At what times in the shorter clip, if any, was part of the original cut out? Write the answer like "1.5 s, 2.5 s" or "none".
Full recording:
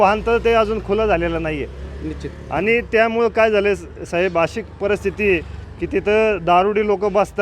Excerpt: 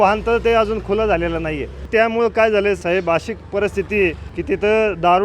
1.9 s, 2.8 s, 4.3 s

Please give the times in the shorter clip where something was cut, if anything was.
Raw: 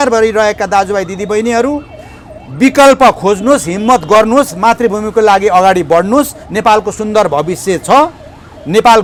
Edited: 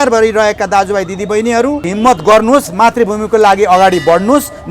1.9 s

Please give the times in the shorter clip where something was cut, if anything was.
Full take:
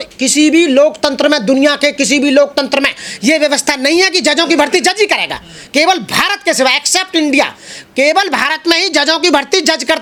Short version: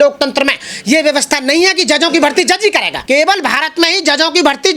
2.9 s

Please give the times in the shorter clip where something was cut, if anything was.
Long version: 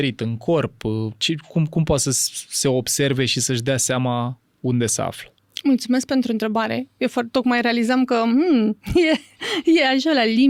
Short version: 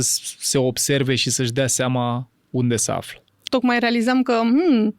3.5 s

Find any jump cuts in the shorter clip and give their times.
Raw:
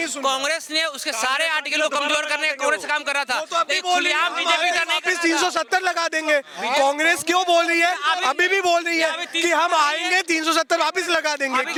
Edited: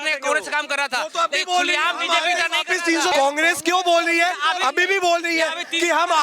3.1 s

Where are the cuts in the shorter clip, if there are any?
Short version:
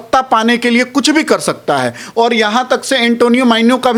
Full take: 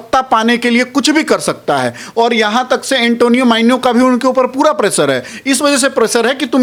none

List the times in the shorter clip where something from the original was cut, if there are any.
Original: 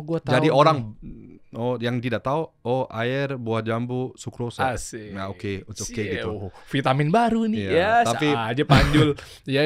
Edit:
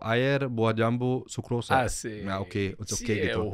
none

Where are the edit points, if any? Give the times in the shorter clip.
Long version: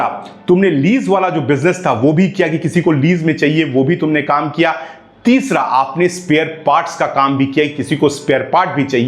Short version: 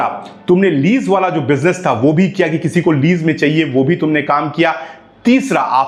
none

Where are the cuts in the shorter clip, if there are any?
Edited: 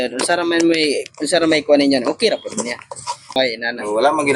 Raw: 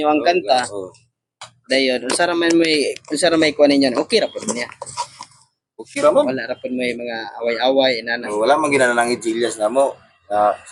3.4 s

